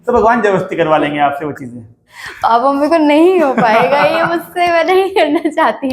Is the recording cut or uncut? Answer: cut